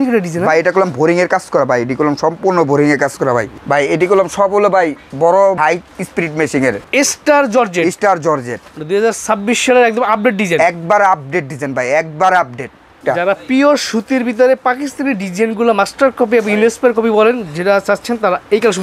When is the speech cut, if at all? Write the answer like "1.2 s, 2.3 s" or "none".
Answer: 3.5 s, 5.6 s, 6.8 s, 13.0 s